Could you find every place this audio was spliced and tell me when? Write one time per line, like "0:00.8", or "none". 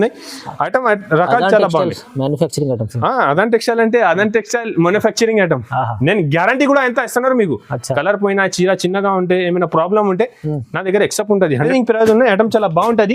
0:11.7

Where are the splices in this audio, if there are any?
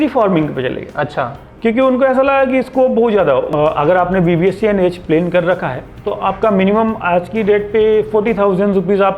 0:03.5

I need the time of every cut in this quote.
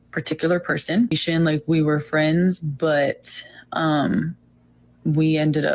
0:01.2

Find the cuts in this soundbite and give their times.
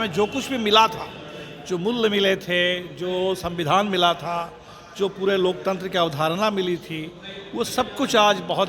none

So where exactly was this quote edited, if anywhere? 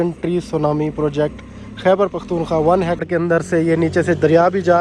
0:03.0

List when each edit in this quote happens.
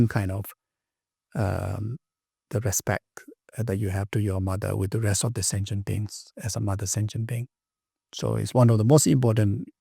none

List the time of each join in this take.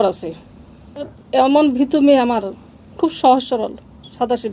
0:01.0

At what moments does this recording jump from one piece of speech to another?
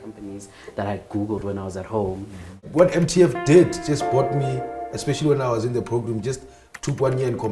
0:02.6

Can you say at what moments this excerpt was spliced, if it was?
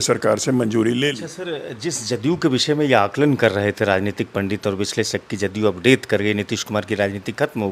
0:01.2

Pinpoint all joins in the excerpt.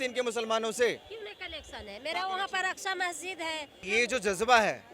0:03.8

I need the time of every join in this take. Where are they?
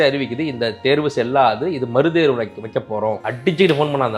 0:03.3

